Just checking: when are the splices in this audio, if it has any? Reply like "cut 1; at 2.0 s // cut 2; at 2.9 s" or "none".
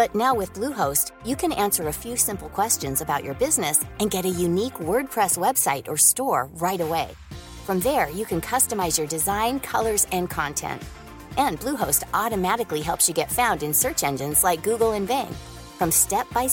none